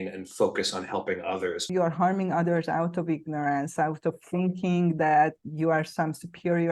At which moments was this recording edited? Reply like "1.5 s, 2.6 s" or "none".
1.7 s, 5.4 s